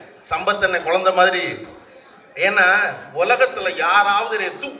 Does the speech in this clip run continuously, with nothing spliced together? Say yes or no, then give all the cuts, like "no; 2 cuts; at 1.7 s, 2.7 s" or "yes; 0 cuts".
yes; 0 cuts